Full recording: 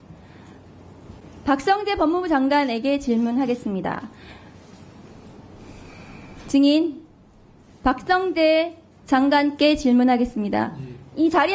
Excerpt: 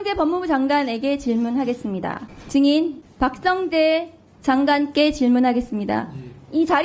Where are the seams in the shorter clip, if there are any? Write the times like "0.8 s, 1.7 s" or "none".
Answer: 2.3 s, 3.0 s